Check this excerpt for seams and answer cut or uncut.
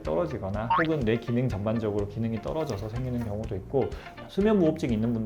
cut